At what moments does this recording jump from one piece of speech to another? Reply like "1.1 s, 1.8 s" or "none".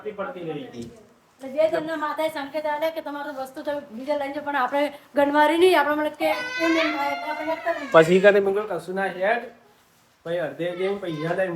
none